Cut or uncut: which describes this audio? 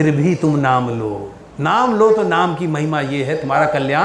uncut